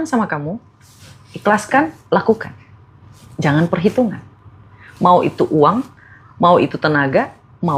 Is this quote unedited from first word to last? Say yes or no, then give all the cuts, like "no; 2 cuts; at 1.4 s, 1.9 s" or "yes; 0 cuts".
yes; 0 cuts